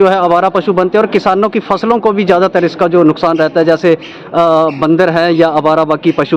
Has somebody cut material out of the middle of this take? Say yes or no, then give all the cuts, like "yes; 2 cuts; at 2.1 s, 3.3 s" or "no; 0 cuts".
no; 0 cuts